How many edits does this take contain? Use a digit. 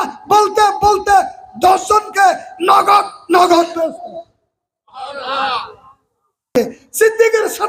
1